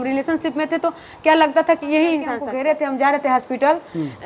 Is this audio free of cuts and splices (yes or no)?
no